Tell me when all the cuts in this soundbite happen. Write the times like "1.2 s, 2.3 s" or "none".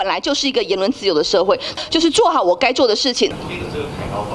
1.7 s, 3.3 s

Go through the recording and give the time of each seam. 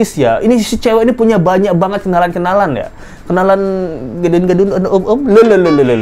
none

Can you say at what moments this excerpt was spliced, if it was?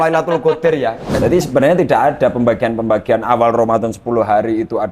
1.1 s

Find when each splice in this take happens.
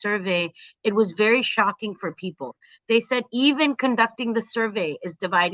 none

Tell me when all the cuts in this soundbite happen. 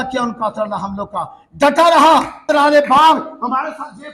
2.4 s

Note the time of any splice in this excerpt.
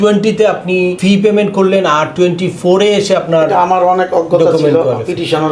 1.0 s

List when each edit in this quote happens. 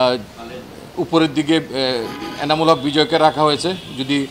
none

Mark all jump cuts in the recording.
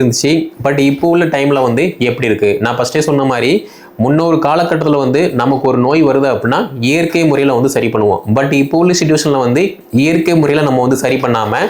none

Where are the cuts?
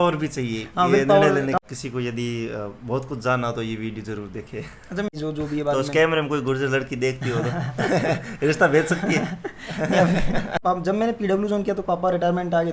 1.6 s, 5.1 s, 10.6 s

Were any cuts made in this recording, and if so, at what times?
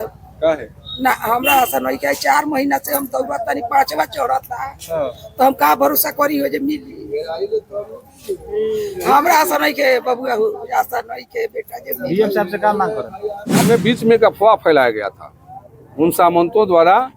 13.6 s

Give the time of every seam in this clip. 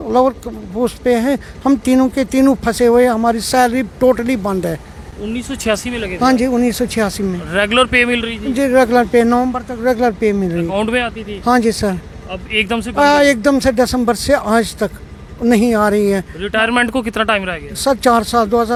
none

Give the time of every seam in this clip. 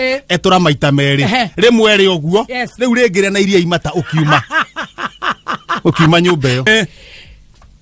6.7 s

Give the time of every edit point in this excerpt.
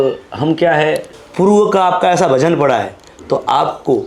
1.1 s

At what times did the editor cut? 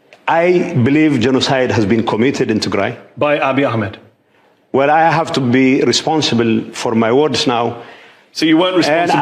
none

